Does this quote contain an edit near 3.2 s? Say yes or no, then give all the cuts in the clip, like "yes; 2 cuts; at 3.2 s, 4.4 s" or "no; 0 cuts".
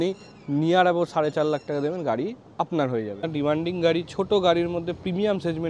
yes; 1 cut; at 3.2 s